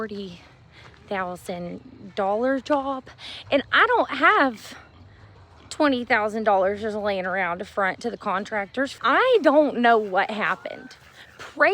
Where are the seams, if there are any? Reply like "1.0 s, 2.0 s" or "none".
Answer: 9.0 s